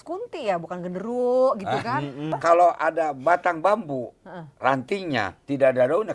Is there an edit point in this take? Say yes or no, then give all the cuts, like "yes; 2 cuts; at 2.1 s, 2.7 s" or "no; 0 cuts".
yes; 1 cut; at 2.4 s